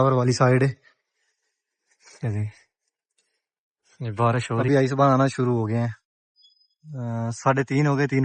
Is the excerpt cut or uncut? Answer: cut